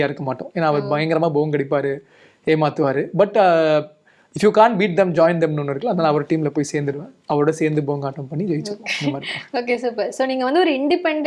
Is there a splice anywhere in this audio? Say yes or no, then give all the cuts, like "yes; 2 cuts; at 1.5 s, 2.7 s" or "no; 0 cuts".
no; 0 cuts